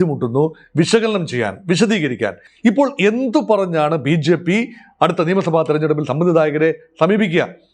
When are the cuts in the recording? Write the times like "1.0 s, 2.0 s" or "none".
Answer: 2.4 s